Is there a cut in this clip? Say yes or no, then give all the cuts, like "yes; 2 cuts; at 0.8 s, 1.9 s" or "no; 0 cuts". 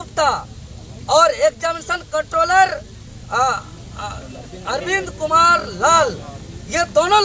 no; 0 cuts